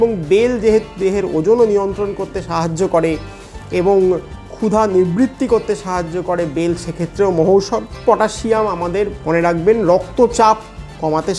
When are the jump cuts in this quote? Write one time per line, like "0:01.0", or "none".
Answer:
0:08.0
0:09.2